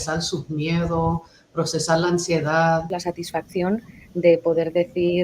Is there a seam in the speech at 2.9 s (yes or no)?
yes